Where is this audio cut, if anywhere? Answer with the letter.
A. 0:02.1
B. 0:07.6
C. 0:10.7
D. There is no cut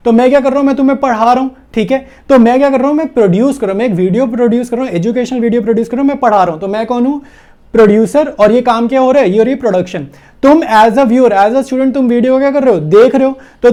D